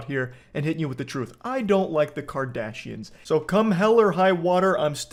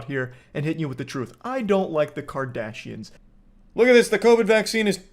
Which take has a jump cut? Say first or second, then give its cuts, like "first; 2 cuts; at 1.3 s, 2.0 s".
second; 1 cut; at 3.1 s